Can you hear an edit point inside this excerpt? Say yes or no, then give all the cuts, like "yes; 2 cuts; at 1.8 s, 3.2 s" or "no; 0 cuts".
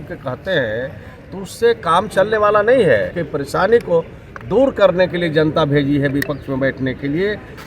yes; 1 cut; at 3.2 s